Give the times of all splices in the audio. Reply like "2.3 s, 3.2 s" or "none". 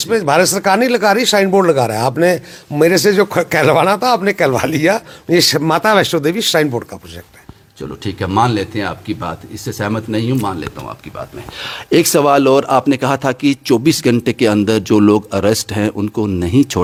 none